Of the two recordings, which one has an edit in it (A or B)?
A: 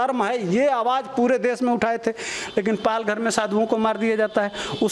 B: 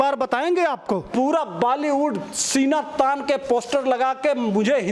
B